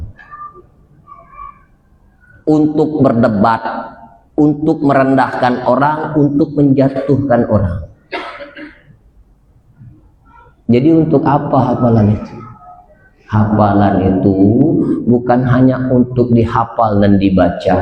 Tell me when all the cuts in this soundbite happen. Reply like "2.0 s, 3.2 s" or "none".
none